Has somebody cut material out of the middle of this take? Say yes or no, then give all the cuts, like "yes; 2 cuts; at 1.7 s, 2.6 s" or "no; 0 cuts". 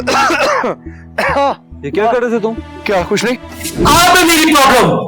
yes; 1 cut; at 3.7 s